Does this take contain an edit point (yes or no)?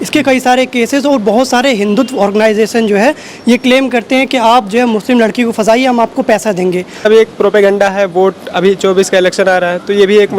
yes